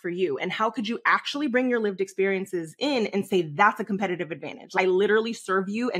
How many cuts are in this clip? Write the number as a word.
one